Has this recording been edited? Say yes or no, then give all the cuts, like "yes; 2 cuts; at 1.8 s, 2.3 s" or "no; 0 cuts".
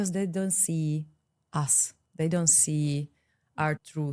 no; 0 cuts